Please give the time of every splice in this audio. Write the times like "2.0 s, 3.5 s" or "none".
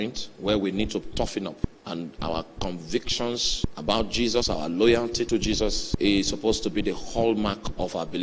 1.7 s, 3.6 s, 5.8 s